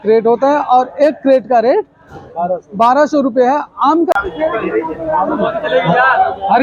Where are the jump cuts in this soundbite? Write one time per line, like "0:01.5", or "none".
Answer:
0:04.1